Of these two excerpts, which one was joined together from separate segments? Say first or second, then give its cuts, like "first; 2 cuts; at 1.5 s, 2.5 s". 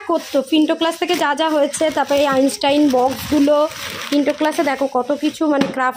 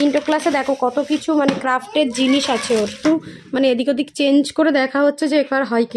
second; 1 cut; at 3.0 s